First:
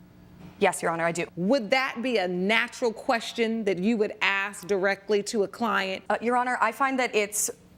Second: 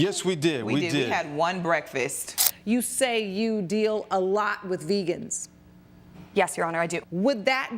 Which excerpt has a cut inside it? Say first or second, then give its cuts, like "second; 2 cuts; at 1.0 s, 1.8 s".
second; 1 cut; at 2.5 s